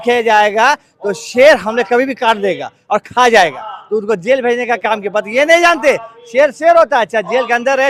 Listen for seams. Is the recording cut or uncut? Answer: uncut